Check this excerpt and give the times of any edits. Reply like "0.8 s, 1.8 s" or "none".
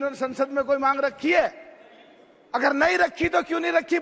none